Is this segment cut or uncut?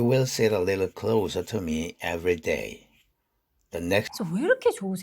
cut